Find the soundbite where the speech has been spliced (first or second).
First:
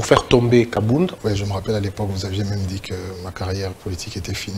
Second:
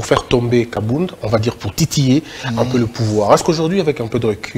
first